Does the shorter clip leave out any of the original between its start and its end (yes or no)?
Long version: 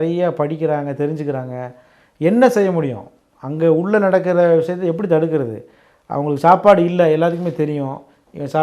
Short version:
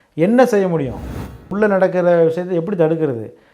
yes